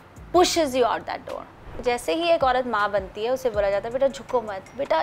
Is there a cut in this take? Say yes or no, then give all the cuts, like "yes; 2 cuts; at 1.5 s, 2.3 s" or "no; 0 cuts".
yes; 1 cut; at 1.6 s